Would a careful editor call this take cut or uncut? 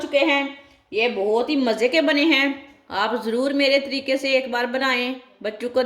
uncut